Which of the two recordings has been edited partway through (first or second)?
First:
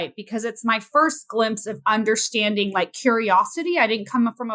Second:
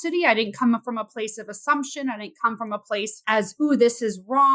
second